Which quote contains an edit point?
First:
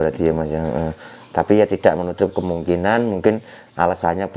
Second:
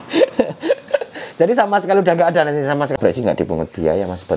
second; 1 cut; at 3.0 s

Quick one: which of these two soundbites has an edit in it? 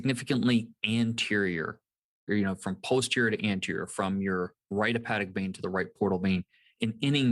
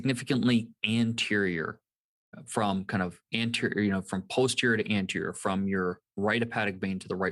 first; 1 cut; at 2.3 s

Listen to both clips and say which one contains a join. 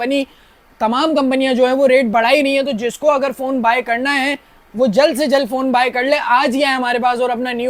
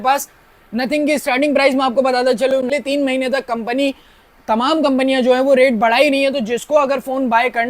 second; 1 cut; at 2.7 s

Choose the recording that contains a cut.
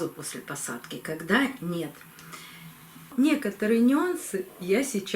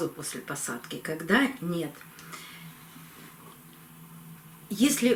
first; 1 cut; at 3.1 s

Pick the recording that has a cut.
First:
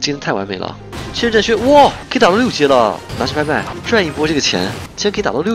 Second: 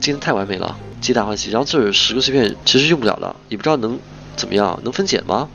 first; 3 cuts; at 0.9 s, 2.0 s, 3.8 s

